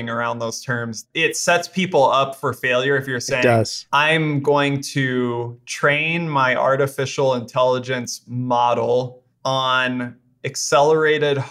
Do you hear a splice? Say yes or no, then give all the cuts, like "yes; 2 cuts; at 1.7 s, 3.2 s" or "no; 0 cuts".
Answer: yes; 1 cut; at 1.0 s